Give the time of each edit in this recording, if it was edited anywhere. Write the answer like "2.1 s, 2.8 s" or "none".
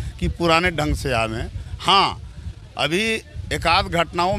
none